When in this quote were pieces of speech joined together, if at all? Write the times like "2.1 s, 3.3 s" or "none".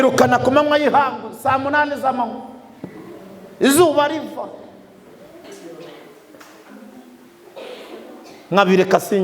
5.4 s